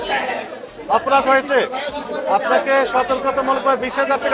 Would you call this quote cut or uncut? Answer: uncut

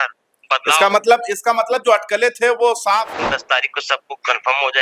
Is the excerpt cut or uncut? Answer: cut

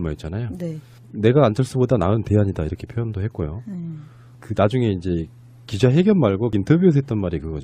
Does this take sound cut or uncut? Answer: uncut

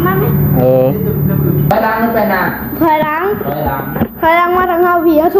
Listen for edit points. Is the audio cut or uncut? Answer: cut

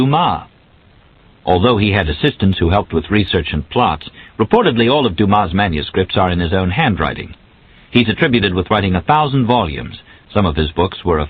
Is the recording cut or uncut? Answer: uncut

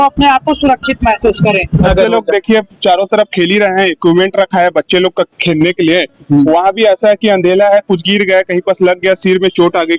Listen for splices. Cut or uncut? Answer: cut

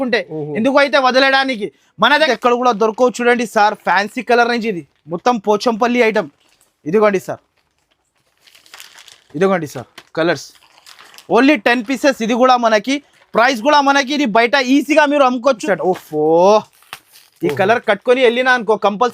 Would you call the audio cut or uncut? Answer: cut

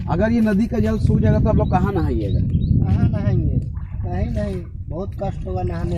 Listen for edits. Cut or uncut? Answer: uncut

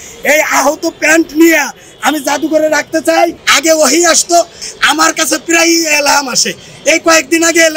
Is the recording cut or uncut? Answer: cut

